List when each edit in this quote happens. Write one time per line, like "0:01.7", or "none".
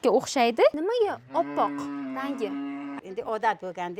0:00.7
0:03.0